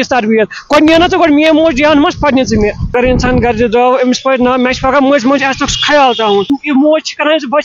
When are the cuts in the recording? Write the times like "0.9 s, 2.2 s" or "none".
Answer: 2.8 s, 6.5 s